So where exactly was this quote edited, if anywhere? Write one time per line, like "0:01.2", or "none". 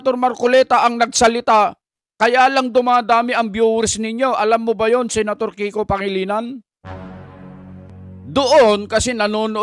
0:07.9